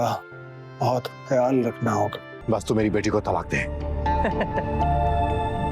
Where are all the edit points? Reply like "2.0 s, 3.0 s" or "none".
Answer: 2.3 s